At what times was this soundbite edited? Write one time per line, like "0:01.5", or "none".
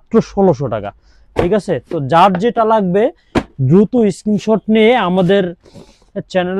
none